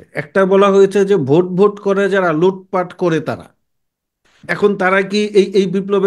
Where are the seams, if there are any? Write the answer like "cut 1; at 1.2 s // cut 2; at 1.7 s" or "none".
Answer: none